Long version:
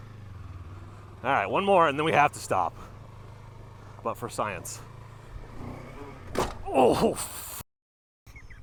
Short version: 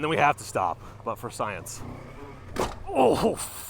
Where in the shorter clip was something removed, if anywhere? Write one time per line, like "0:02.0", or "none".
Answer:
0:00.9
0:01.8

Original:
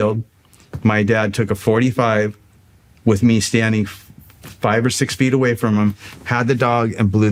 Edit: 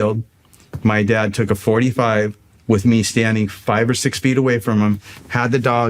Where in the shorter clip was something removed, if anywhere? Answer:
0:02.5
0:03.6

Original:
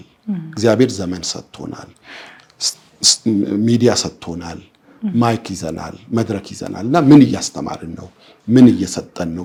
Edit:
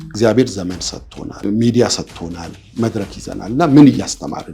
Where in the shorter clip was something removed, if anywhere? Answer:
0:01.4
0:02.6

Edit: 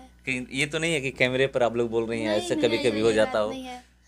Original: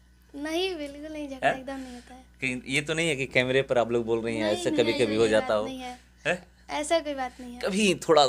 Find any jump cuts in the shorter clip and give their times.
none

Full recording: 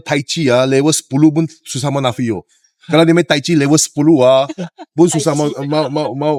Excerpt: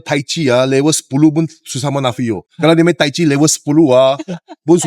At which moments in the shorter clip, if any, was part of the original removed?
0:02.5

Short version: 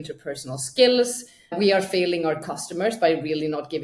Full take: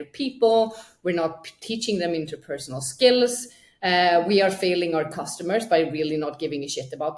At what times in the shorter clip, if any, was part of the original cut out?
0:01.6

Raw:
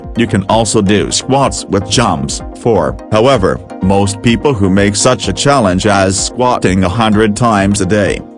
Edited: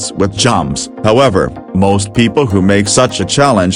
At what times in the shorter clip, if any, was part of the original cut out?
0:00.9

